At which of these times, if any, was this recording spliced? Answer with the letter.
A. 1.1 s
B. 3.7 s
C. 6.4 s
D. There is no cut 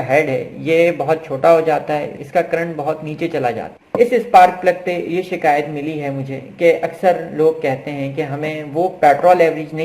B